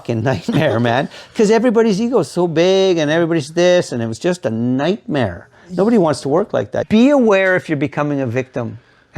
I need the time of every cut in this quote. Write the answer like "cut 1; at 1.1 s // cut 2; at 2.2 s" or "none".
cut 1; at 6.8 s